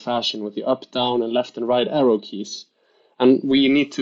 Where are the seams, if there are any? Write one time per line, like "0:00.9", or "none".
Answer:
none